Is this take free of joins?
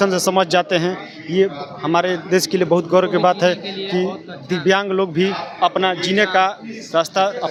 yes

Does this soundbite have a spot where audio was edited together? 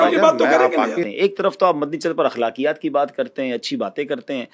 yes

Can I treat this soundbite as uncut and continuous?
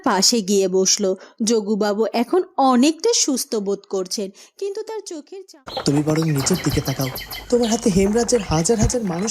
no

